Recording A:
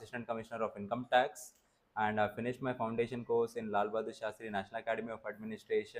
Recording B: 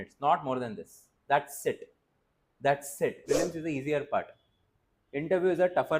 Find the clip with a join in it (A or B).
B